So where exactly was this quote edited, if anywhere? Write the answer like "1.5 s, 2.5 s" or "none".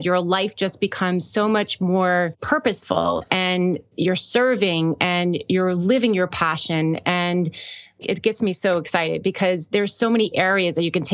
2.4 s